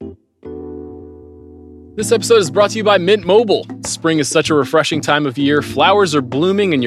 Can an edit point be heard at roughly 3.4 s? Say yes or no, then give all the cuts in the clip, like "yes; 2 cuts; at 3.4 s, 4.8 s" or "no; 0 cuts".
no; 1 cut; at 1.8 s